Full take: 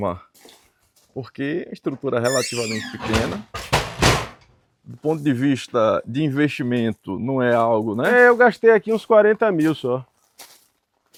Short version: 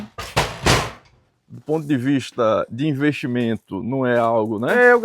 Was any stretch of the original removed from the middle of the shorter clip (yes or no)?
no